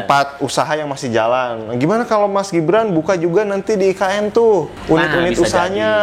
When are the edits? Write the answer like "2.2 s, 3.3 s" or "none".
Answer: 4.7 s